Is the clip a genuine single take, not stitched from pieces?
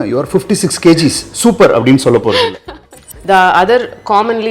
no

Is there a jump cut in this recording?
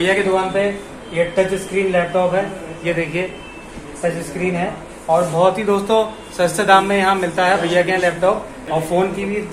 no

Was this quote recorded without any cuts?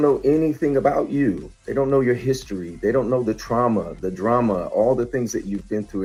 yes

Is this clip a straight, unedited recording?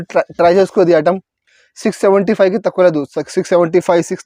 yes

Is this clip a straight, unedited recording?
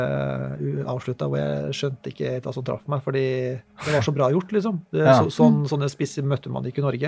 yes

